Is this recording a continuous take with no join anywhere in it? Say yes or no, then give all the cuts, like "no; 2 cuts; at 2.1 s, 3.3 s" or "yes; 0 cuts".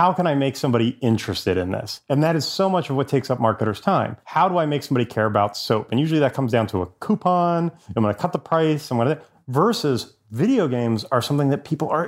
no; 3 cuts; at 1.9 s, 4.2 s, 7.8 s